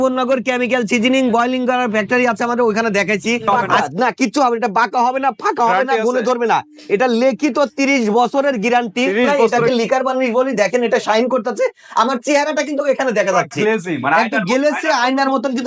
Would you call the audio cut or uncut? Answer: cut